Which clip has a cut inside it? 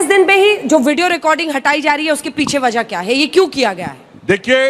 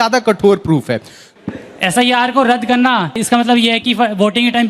second; 2 cuts; at 1.3 s, 3.2 s

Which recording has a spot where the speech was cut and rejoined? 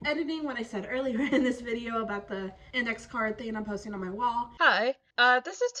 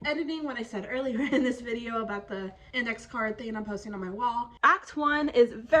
second; 1 cut; at 4.5 s

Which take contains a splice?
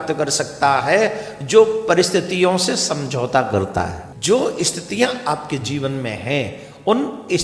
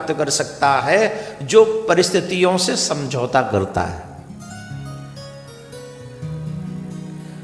first; 1 cut; at 4.1 s

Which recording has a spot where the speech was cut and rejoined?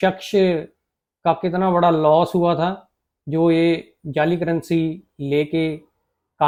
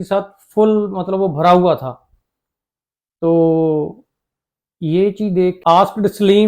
second; 1 cut; at 5.6 s

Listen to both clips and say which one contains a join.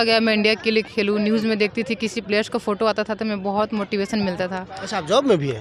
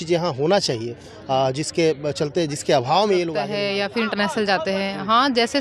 second; 1 cut; at 3.5 s

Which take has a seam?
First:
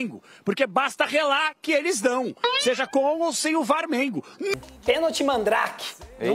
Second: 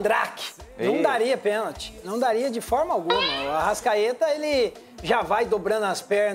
first; 1 cut; at 4.5 s

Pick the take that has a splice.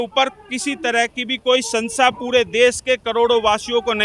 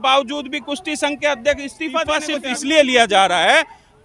second; 1 cut; at 2.2 s

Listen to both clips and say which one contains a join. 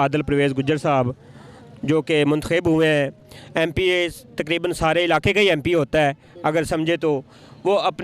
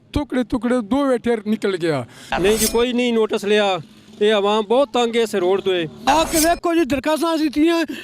second; 2 cuts; at 2.2 s, 5.9 s

